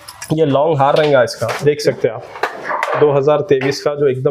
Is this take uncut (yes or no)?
yes